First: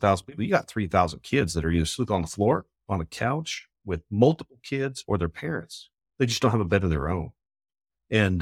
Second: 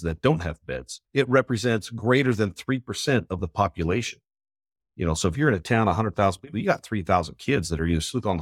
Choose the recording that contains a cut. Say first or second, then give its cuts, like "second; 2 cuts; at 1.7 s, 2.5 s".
second; 1 cut; at 0.9 s